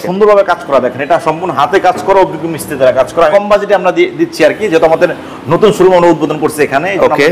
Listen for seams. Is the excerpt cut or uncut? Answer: cut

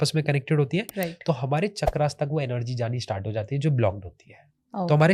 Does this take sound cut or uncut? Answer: uncut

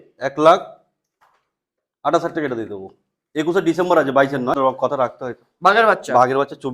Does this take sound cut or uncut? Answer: cut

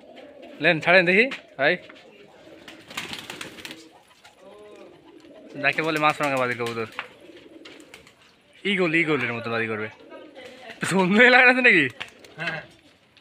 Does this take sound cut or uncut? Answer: uncut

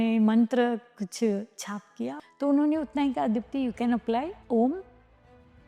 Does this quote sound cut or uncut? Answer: cut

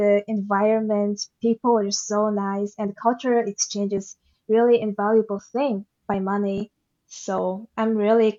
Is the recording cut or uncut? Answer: uncut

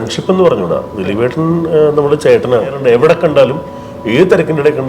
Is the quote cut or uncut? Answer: cut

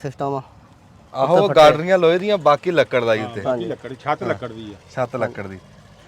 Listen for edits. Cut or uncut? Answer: uncut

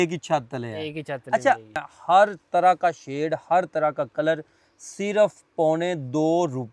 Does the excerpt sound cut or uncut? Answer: cut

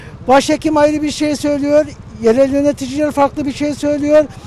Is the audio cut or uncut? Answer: uncut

